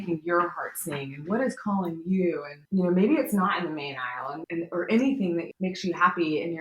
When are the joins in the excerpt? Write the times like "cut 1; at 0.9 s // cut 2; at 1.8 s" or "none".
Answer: cut 1; at 2.5 s // cut 2; at 4.3 s // cut 3; at 5.5 s